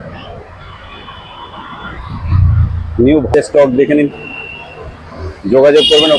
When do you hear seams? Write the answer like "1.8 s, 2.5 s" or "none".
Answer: 3.3 s